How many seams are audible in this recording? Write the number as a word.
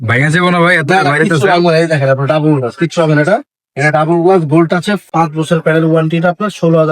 one